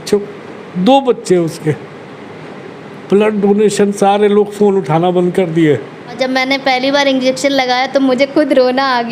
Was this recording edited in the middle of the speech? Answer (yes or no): yes